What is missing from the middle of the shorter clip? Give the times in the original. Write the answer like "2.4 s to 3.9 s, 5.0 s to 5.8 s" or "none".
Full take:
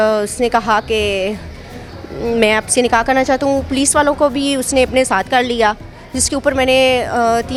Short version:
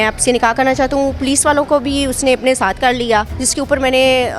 5.9 s to 6.2 s